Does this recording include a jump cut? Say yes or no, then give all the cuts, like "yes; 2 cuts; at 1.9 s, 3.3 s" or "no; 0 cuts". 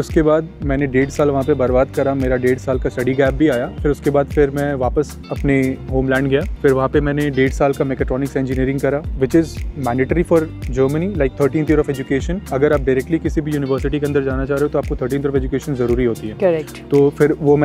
no; 0 cuts